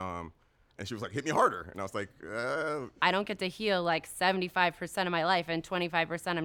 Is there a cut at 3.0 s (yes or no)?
yes